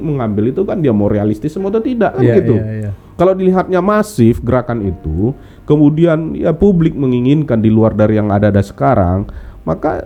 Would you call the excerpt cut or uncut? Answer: uncut